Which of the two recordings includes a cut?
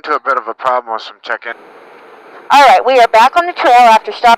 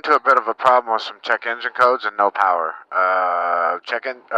first; 1 cut; at 1.6 s

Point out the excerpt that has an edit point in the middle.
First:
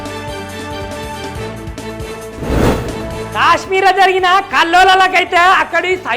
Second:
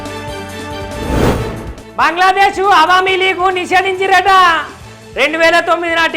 second; 1 cut; at 0.9 s

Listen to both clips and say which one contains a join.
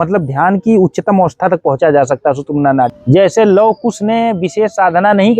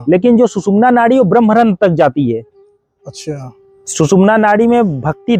first; 1 cut; at 3.0 s

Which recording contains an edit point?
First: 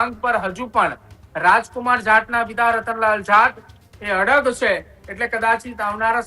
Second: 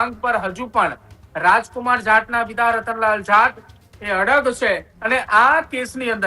second; 1 cut; at 4.9 s

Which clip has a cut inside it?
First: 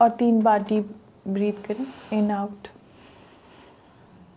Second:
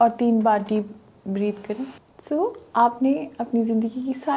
second; 1 cut; at 2.0 s

